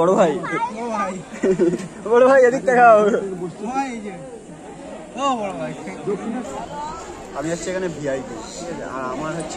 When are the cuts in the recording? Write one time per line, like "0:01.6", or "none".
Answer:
0:06.4